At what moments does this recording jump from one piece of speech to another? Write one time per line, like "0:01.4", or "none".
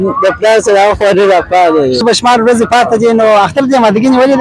0:02.0